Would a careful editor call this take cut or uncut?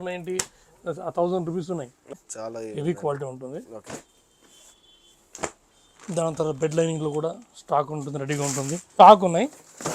cut